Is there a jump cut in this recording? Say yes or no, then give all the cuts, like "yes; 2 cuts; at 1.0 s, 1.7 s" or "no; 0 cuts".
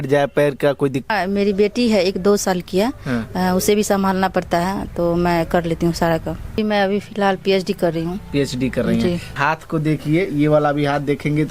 yes; 3 cuts; at 1.1 s, 6.5 s, 9.3 s